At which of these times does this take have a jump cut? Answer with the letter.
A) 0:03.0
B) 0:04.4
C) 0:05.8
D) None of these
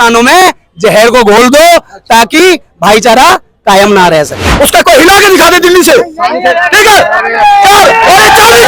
B